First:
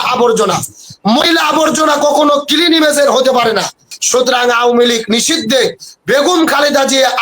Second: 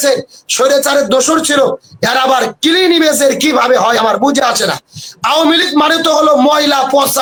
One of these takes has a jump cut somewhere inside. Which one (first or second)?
first